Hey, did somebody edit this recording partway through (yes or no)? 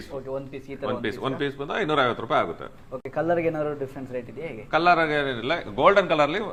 no